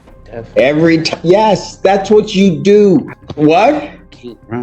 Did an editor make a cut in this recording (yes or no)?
yes